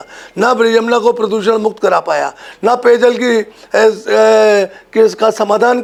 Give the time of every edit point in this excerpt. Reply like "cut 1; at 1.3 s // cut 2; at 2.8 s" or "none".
none

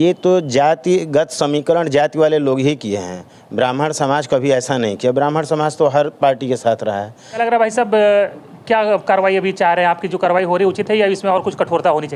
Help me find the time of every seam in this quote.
cut 1; at 7.4 s

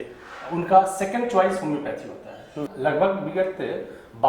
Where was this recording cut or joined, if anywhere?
cut 1; at 2.6 s

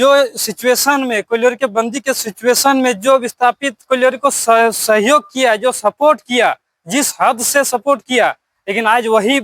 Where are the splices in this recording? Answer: none

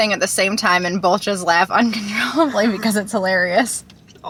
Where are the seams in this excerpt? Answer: none

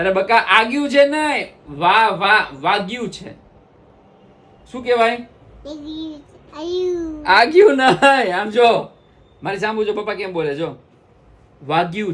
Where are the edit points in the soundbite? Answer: none

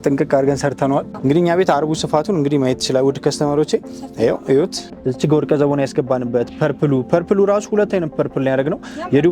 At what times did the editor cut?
cut 1; at 1.1 s // cut 2; at 4.9 s

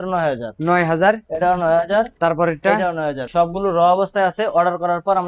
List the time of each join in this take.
cut 1; at 3.3 s

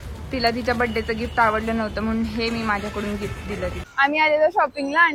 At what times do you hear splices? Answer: cut 1; at 4.0 s

